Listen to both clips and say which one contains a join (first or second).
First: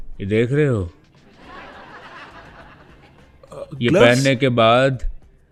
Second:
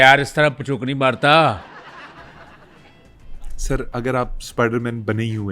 second